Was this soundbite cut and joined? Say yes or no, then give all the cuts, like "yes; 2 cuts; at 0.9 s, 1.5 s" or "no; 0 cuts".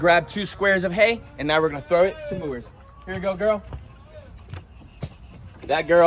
no; 0 cuts